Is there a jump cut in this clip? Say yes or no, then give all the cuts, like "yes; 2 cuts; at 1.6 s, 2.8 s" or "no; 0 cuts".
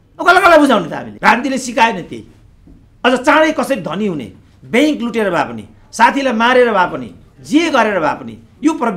yes; 1 cut; at 1.0 s